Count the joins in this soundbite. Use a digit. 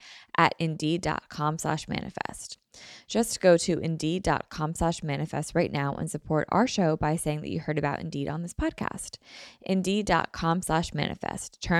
0